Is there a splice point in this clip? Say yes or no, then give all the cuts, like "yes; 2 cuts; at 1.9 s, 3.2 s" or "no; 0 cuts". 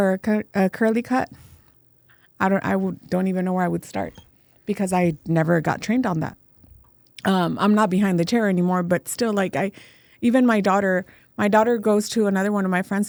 no; 0 cuts